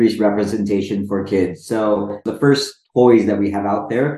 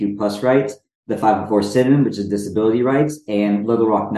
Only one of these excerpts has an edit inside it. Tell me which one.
first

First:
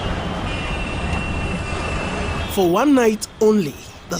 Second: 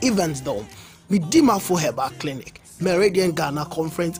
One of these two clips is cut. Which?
first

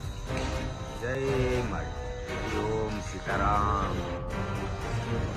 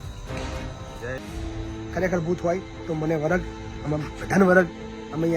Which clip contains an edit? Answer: second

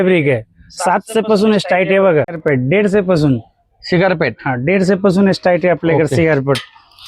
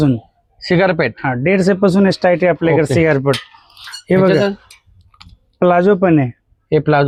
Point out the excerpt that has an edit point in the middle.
first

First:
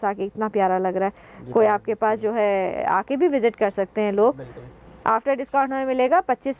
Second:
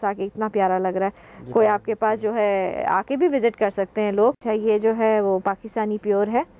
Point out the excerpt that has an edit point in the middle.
second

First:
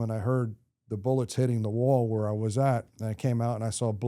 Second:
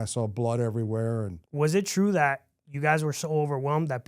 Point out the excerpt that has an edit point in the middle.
second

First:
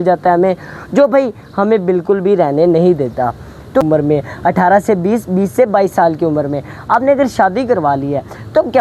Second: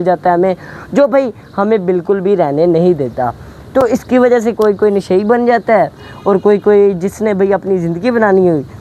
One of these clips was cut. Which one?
first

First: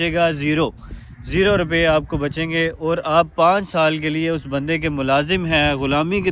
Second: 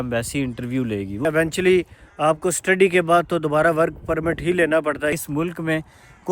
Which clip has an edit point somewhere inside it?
second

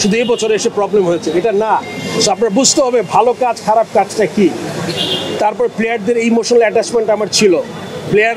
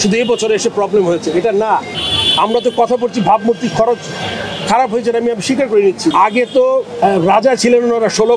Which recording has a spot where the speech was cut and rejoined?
second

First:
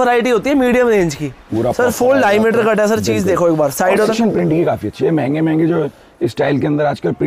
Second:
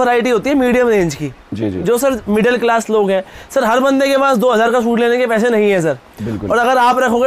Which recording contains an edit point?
first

